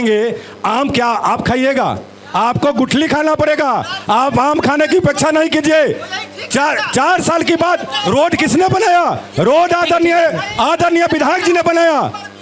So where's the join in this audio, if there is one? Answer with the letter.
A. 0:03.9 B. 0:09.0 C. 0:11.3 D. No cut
D